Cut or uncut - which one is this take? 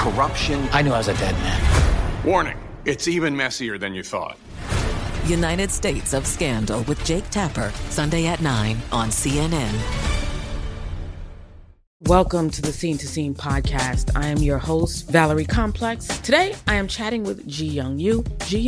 cut